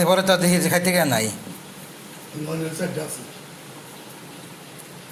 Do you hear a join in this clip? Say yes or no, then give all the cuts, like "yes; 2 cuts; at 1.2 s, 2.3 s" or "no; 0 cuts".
no; 0 cuts